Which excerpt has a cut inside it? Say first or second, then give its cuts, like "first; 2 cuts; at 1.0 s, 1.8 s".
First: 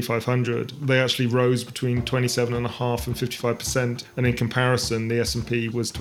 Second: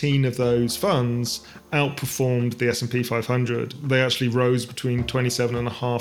first; 1 cut; at 4.0 s